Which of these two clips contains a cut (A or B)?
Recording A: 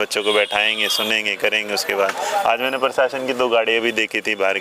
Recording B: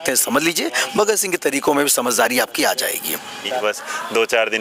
B